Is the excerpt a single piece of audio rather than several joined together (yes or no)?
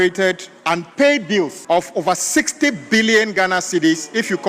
no